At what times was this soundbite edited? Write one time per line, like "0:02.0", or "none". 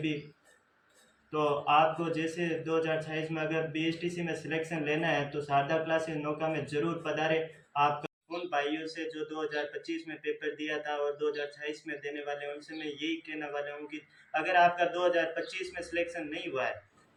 none